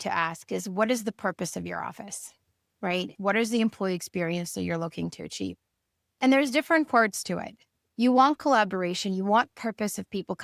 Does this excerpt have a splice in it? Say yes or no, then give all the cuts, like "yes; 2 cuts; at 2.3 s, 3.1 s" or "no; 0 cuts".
no; 0 cuts